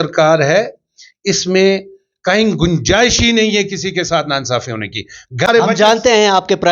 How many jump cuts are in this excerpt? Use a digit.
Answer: 1